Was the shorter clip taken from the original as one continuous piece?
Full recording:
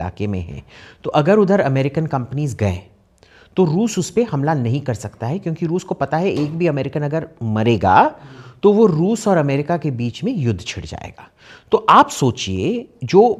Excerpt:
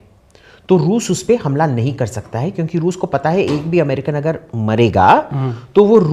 yes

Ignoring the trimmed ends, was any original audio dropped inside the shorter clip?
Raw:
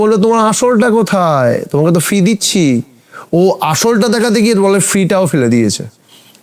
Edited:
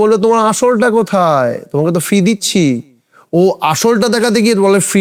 no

